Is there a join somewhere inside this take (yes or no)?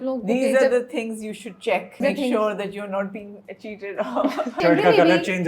yes